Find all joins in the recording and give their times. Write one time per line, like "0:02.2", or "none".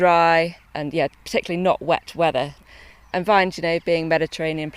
0:02.6